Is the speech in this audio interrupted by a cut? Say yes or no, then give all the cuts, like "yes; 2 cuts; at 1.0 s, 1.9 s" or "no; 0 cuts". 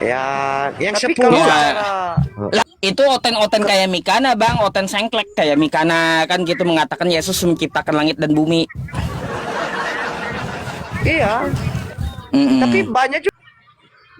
yes; 2 cuts; at 1.3 s, 13.3 s